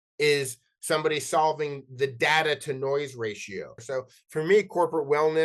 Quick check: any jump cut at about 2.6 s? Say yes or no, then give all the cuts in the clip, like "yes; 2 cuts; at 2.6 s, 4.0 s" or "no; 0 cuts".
no; 1 cut; at 3.8 s